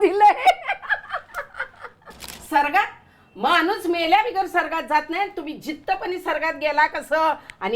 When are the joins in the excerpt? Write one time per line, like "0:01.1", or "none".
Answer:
0:02.3